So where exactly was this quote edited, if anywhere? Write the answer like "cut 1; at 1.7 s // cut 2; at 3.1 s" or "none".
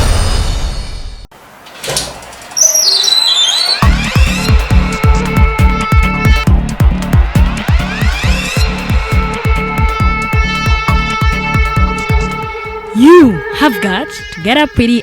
cut 1; at 1.3 s

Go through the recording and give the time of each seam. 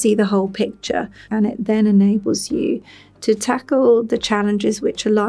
cut 1; at 1.2 s

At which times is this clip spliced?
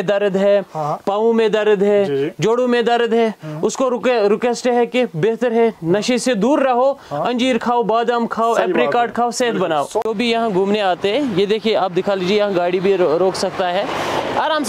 cut 1; at 10.1 s

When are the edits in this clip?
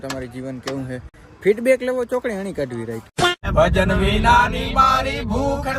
none

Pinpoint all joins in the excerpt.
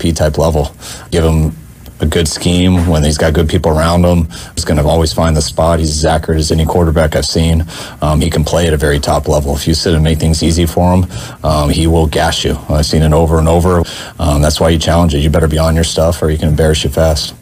cut 1; at 1.1 s // cut 2; at 4.6 s // cut 3; at 13.8 s

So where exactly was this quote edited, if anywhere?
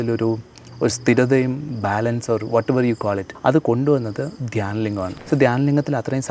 cut 1; at 1.7 s // cut 2; at 3.3 s // cut 3; at 5.2 s

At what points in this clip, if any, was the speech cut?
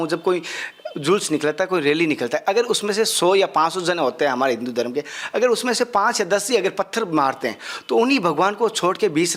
none

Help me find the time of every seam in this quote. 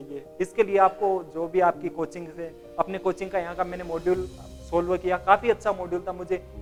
none

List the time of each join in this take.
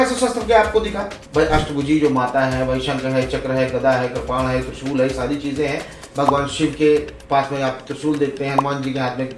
cut 1; at 1.2 s

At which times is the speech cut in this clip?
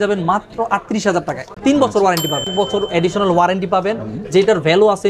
cut 1; at 1.5 s // cut 2; at 2.5 s

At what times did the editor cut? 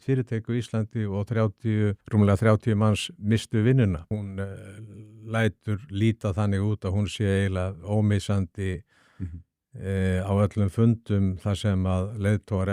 cut 1; at 2.0 s // cut 2; at 4.1 s

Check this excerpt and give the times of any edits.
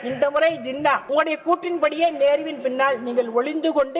cut 1; at 1.0 s

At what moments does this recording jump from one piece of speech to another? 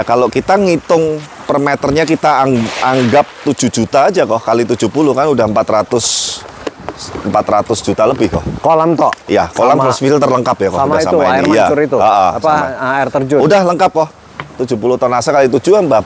none

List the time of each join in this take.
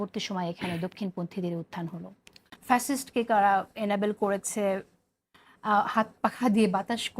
cut 1; at 2.5 s

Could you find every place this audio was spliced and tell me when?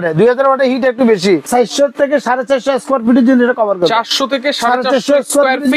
cut 1; at 1.5 s

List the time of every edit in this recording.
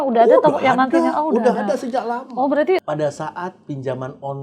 cut 1; at 2.8 s

